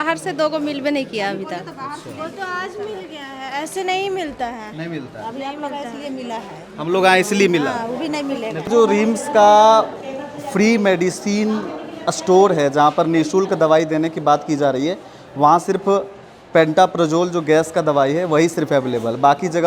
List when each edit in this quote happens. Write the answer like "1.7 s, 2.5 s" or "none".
none

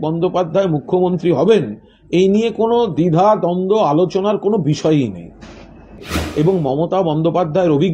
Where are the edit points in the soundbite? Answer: 6.1 s

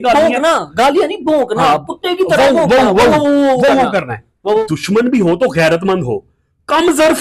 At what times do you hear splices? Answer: 4.6 s

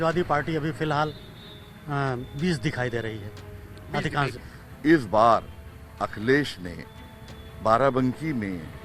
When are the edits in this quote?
4.4 s

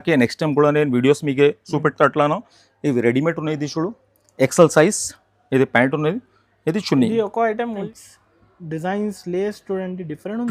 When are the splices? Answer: 7.9 s

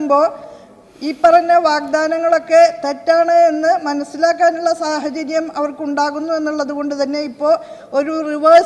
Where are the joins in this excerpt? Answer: none

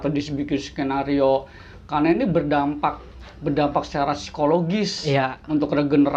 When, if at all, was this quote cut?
none

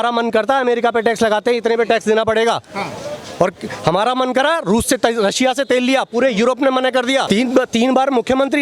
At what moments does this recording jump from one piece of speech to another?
7.2 s

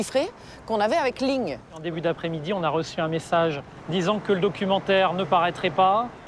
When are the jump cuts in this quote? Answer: none

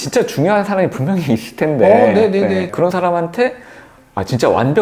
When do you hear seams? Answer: 2.7 s

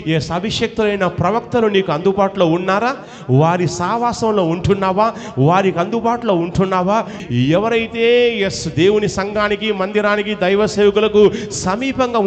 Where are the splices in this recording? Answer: 7.2 s

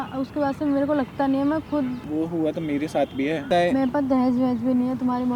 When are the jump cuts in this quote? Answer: 2.0 s, 3.4 s

